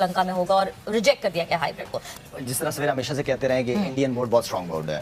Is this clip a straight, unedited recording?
no; 1 cut; at 2.2 s

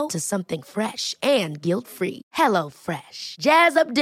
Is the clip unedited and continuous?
yes; 0 cuts

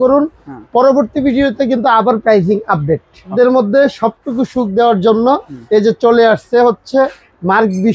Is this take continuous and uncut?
no; 1 cut; at 3.3 s

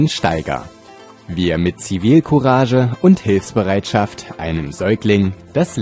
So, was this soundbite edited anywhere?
no; 0 cuts

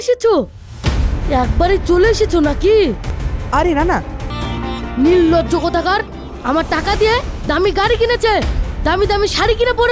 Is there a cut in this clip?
yes; 2 cuts; at 3.1 s, 4.2 s

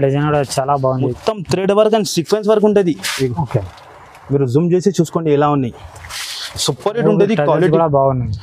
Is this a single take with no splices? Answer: no; 1 cut; at 1.1 s

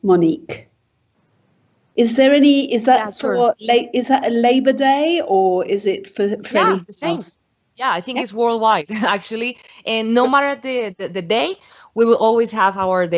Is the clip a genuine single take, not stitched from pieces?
no; 1 cut; at 4.9 s

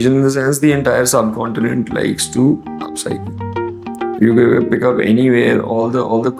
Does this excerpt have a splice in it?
no; 0 cuts

